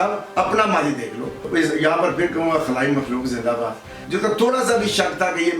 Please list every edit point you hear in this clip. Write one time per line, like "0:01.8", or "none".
0:01.4
0:03.9